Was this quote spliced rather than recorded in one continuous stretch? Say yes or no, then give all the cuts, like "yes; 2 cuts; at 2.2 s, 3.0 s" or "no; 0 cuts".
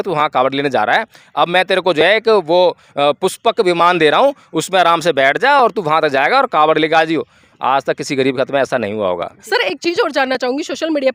no; 0 cuts